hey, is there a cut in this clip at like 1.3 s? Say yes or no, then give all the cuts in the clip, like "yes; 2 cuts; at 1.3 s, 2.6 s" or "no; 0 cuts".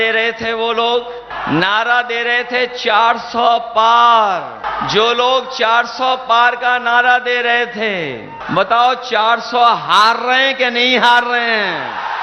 yes; 3 cuts; at 1.3 s, 4.7 s, 8.4 s